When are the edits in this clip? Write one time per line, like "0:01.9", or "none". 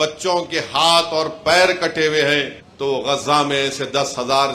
0:02.6